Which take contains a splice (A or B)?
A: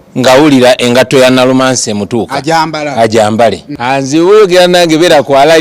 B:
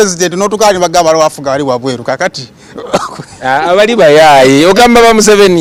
A